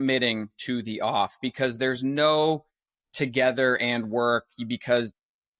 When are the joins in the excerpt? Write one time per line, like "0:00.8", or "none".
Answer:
none